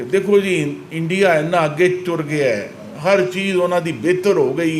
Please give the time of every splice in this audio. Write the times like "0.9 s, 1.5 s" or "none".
none

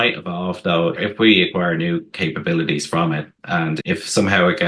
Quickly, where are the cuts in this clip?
1.0 s, 3.8 s

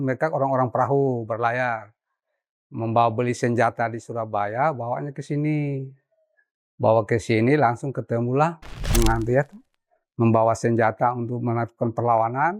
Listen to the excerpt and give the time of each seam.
8.9 s

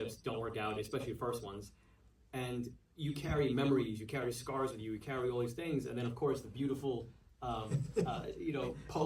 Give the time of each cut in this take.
none

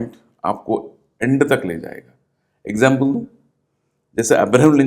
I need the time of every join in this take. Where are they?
none

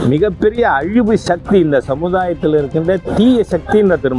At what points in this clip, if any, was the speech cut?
none

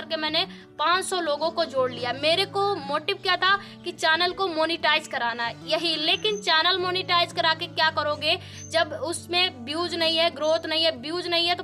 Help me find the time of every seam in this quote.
none

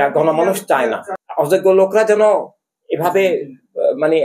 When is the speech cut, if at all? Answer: 1.1 s

